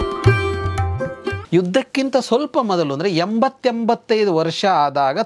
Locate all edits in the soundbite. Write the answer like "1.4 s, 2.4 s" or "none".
1.4 s